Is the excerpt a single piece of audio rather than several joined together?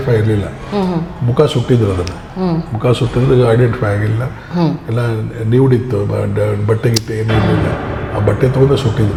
yes; 0 cuts

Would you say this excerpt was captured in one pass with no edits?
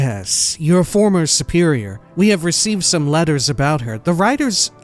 no; 1 cut; at 2.0 s

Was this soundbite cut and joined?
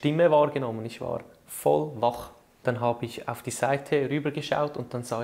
yes; 1 cut; at 2.4 s

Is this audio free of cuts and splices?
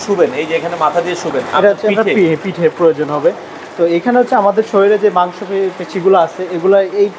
yes; 0 cuts

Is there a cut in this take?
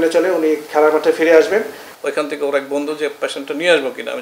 yes; 1 cut; at 1.9 s

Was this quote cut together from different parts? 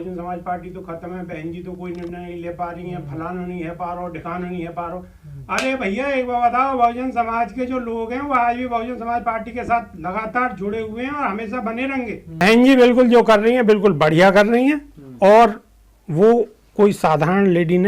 yes; 1 cut; at 12.4 s

